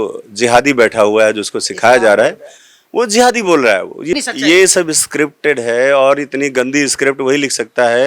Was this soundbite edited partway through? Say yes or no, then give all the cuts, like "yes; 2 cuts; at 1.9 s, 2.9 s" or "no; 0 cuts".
yes; 1 cut; at 4.1 s